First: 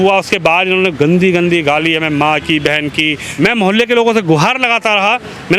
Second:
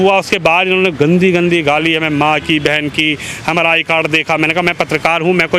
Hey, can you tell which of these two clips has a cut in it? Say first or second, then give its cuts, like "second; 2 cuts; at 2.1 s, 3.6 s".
first; 1 cut; at 3.2 s